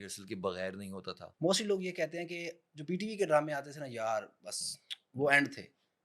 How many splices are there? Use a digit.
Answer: 1